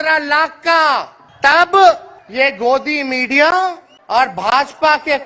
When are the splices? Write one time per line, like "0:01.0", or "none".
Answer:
0:01.2
0:02.2
0:03.9